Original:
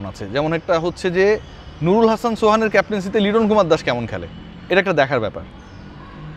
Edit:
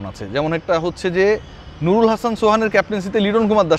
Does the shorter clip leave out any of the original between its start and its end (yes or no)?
no